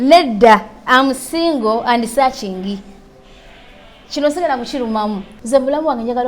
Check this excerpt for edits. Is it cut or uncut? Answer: cut